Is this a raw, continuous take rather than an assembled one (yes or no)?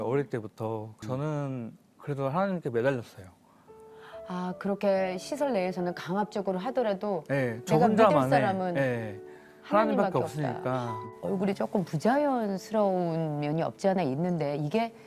no